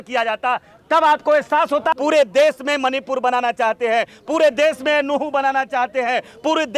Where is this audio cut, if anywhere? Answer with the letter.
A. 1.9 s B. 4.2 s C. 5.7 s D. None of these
A